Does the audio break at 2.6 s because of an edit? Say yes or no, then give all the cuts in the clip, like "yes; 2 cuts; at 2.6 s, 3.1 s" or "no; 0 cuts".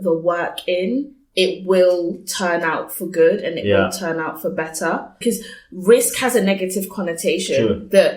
no; 1 cut; at 5.2 s